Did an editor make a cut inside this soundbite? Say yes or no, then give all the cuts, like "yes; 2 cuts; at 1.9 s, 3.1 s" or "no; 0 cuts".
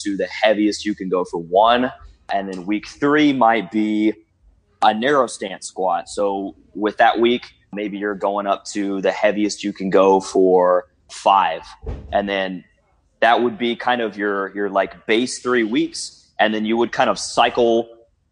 yes; 4 cuts; at 2.3 s, 4.8 s, 7.7 s, 11.1 s